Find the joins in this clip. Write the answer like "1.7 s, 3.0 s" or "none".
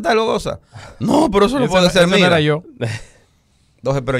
none